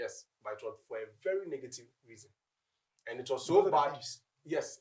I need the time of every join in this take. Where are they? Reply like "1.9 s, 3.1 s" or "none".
none